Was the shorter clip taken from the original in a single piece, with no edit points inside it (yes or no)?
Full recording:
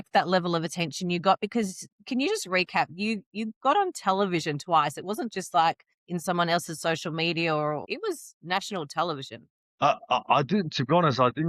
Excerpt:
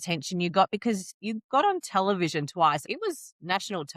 no